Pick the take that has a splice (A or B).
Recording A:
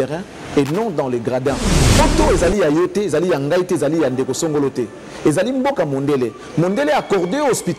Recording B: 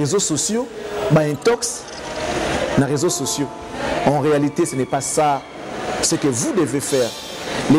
A